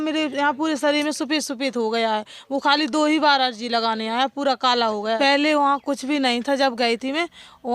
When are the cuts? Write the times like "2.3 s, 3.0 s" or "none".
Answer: 5.2 s